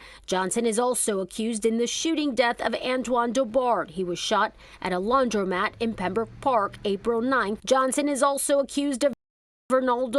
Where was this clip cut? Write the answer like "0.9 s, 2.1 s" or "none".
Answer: 7.6 s

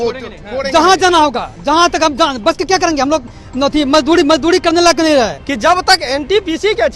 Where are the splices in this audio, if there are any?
5.4 s

